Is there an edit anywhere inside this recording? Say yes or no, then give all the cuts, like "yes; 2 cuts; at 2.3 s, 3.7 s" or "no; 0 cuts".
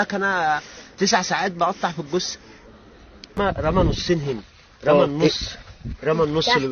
yes; 1 cut; at 3.4 s